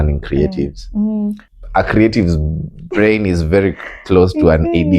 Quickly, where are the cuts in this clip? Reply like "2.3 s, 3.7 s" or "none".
1.5 s